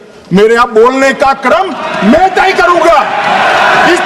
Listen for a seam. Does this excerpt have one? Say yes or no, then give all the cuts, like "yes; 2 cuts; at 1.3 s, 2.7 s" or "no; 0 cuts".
no; 0 cuts